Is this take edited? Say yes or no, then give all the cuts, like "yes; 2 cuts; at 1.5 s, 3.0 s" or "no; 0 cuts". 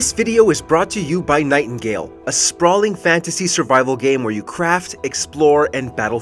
no; 0 cuts